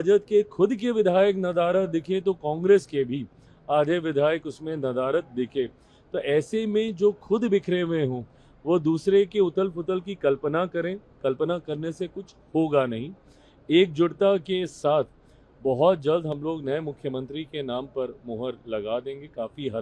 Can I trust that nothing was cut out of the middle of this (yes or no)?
yes